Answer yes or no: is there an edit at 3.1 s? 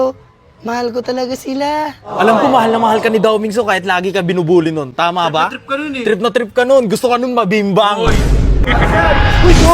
no